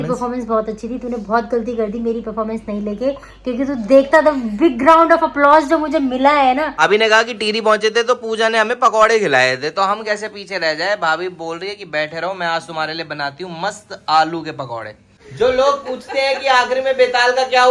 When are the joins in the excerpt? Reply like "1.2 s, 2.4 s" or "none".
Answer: 6.7 s, 15.3 s